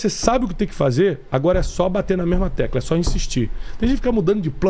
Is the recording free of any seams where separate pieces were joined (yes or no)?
yes